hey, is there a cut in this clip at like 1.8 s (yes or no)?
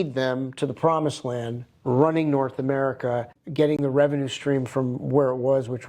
no